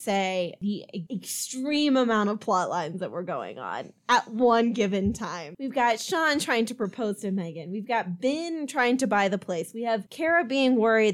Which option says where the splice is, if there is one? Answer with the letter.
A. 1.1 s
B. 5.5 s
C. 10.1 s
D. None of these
A